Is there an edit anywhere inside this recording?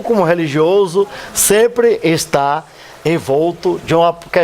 yes; 1 cut; at 2.2 s

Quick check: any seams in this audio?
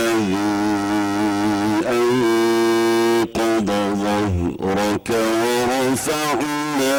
no; 0 cuts

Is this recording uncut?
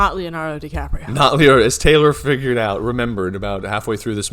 yes; 0 cuts

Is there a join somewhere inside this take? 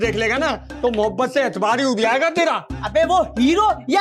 no; 0 cuts

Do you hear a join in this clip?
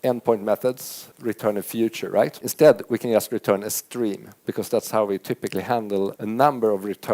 yes; 4 cuts; at 1.1 s, 2.4 s, 4.4 s, 6.2 s

